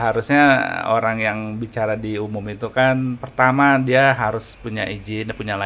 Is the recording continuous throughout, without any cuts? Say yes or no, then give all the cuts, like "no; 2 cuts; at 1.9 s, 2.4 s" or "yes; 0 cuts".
yes; 0 cuts